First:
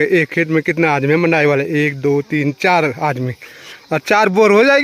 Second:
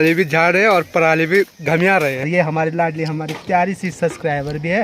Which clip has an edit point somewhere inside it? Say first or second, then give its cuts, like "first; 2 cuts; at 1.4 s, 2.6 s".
second; 1 cut; at 2.2 s